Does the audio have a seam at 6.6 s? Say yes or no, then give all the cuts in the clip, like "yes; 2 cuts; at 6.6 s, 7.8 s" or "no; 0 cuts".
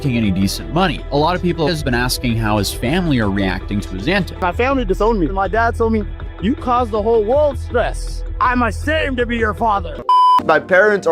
no; 2 cuts; at 4.4 s, 10.1 s